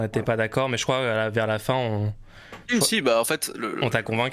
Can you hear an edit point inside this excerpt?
no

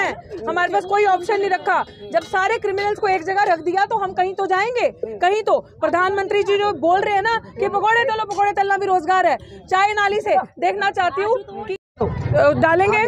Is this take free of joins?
yes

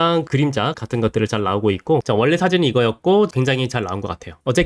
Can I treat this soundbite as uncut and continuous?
no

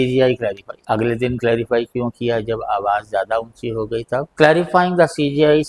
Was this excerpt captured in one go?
no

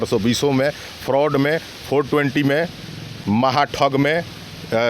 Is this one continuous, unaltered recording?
no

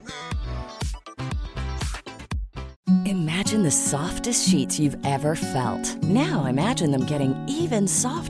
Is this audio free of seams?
no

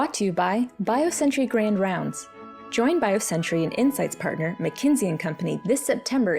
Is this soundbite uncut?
yes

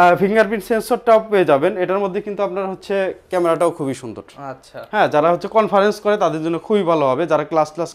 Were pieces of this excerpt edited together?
no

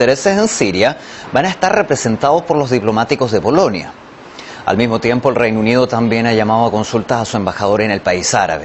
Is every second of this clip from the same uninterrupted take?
no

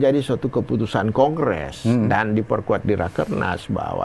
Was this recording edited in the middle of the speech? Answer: no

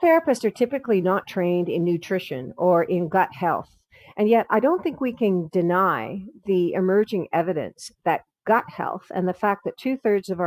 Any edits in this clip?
no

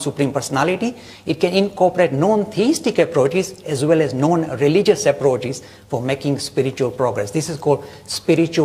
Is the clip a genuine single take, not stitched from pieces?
no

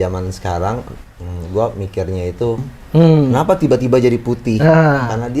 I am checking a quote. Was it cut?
yes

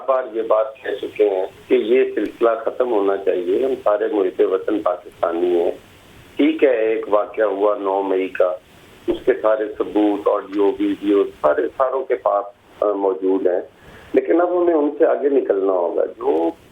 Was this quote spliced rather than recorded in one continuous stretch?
yes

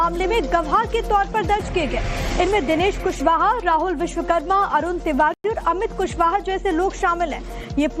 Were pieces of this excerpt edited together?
no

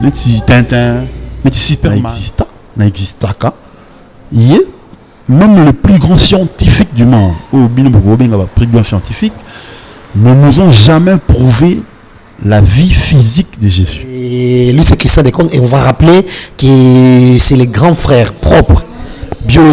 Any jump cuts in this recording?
yes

